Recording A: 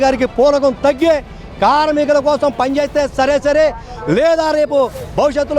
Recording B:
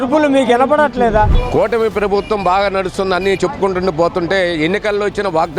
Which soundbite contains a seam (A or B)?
B